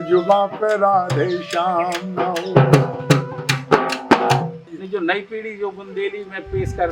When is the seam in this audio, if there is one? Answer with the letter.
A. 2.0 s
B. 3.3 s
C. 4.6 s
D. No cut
C